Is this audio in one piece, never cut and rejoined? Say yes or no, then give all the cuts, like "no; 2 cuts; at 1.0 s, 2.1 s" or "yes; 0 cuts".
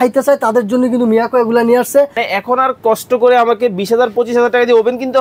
no; 1 cut; at 2.2 s